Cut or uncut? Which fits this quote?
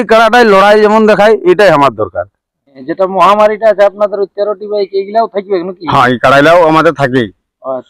cut